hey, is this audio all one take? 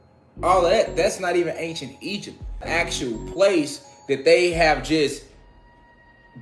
no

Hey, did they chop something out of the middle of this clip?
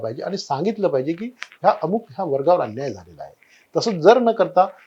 no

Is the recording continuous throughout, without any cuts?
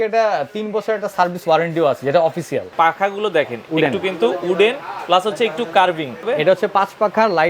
no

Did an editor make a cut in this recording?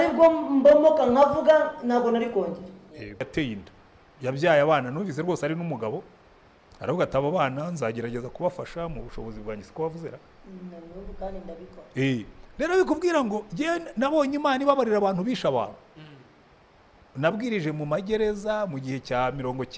yes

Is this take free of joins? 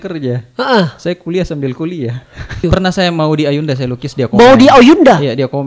no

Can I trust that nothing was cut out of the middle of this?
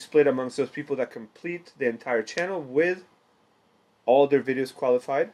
yes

